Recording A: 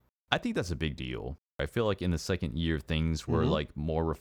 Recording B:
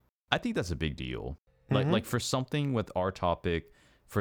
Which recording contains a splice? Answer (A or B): A